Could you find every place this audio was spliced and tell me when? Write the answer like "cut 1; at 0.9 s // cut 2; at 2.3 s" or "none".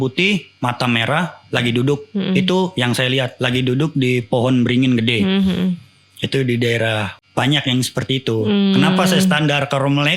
cut 1; at 7.1 s